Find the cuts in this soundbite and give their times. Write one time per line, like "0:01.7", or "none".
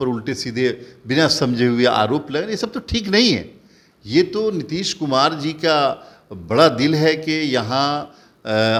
none